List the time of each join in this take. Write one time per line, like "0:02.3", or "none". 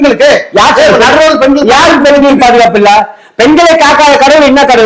none